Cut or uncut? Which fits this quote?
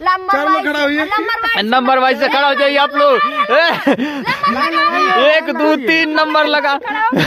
uncut